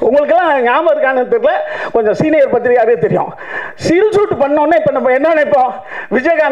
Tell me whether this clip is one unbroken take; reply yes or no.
yes